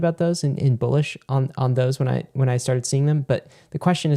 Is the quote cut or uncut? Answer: uncut